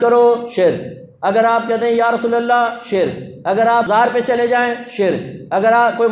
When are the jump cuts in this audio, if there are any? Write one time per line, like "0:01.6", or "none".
0:03.9